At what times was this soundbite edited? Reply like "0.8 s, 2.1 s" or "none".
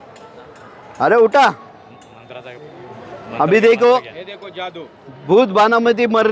none